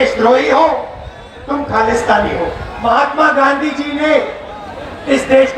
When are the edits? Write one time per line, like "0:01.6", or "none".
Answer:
0:02.7